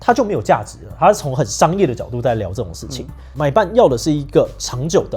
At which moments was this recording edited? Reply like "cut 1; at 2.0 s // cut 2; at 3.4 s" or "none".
cut 1; at 3.2 s